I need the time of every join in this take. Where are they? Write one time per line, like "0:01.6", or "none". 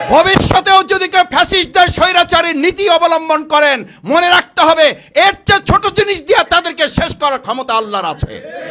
none